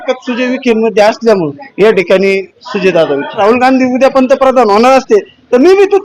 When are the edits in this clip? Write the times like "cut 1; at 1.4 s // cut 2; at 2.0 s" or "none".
cut 1; at 1.6 s // cut 2; at 3.4 s